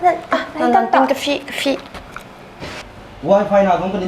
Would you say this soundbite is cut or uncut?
cut